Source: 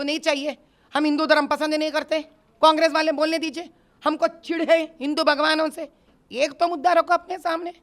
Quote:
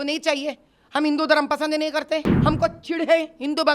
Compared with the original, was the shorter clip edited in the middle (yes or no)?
yes